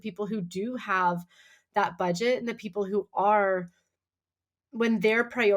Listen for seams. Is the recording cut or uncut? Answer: uncut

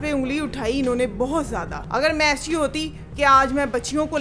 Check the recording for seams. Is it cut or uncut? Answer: cut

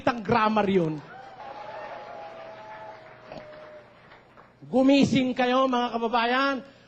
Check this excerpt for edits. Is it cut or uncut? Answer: uncut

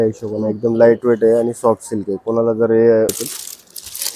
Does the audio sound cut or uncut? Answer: cut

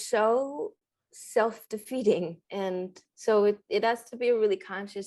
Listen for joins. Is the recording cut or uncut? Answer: cut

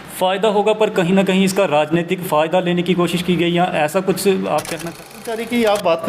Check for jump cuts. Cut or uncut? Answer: cut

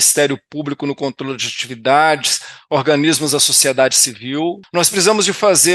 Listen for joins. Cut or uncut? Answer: cut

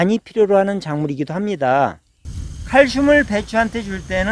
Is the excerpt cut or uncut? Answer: cut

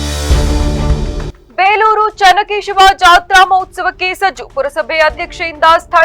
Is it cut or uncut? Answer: cut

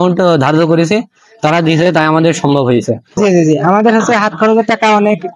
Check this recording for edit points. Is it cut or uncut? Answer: cut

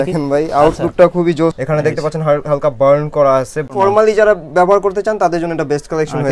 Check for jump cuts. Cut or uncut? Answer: cut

